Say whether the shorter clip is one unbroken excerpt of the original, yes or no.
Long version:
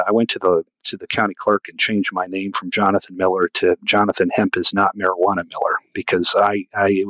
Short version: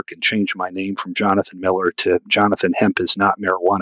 yes